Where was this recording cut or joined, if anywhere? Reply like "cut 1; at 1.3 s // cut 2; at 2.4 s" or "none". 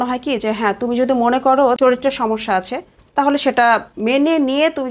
cut 1; at 1.8 s